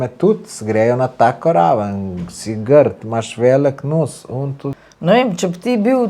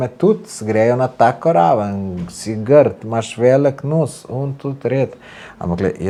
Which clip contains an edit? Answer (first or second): first